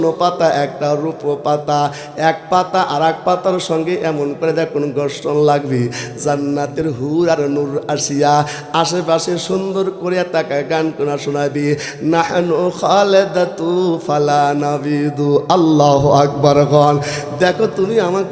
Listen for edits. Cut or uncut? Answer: uncut